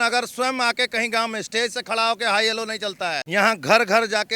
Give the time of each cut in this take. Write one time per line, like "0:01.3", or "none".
0:03.2